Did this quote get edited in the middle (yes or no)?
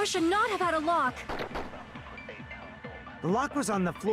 no